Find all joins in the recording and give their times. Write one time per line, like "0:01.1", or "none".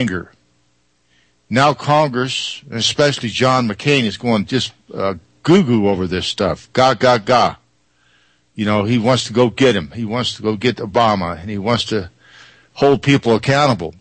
0:12.6